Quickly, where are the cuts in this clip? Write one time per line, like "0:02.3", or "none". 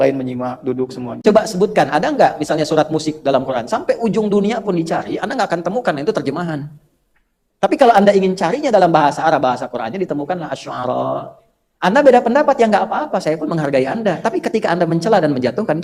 0:01.2